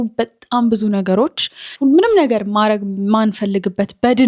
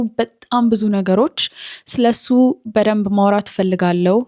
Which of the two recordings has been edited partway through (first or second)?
first